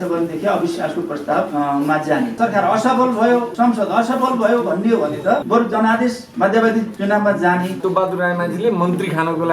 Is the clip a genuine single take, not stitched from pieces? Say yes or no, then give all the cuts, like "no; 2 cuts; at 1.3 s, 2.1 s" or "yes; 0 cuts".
no; 7 cuts; at 1.5 s, 2.3 s, 3.5 s, 5.4 s, 6.2 s, 6.9 s, 7.8 s